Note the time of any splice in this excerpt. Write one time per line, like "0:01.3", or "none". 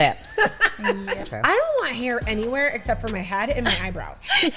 0:01.2